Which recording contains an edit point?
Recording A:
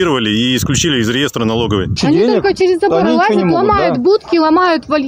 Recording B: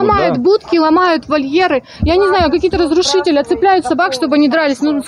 A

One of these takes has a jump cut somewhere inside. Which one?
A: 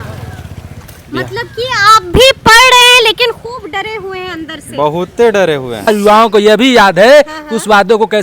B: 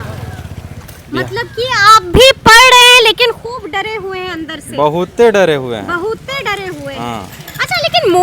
A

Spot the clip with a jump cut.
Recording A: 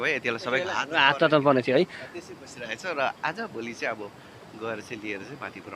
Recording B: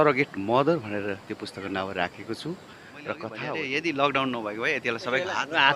B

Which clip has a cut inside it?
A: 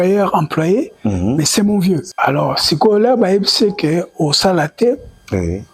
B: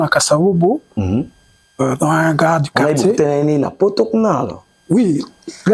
A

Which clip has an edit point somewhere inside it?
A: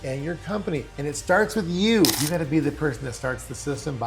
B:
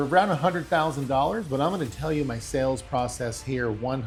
A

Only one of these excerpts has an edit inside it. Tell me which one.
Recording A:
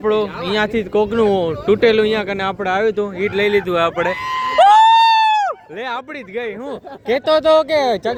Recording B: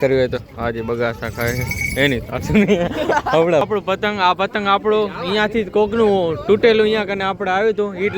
B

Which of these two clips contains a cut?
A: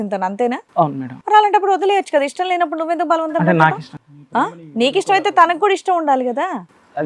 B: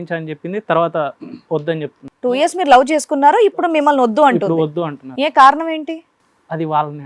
B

